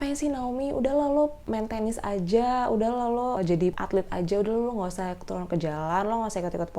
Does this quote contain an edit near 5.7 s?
no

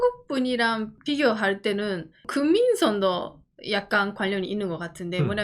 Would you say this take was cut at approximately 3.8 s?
no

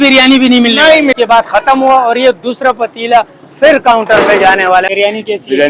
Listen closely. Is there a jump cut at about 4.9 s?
yes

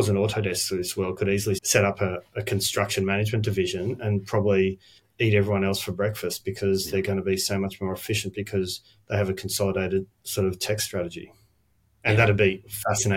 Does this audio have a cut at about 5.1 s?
no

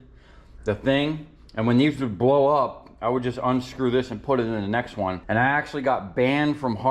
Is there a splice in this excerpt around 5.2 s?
yes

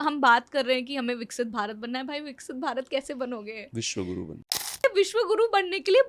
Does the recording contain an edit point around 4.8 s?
yes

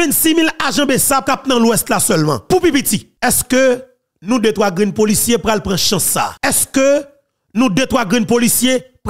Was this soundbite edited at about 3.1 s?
yes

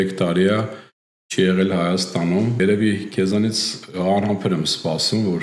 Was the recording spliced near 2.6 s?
yes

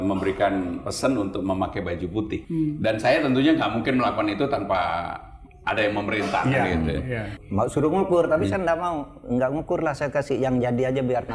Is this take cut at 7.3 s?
yes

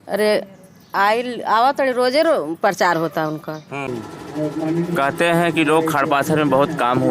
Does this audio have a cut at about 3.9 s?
yes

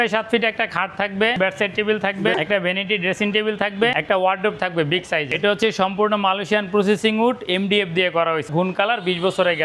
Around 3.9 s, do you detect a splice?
yes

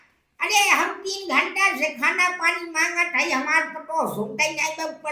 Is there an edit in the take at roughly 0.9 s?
no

